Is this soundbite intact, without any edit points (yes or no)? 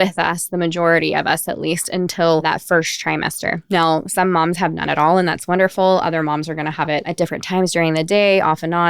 no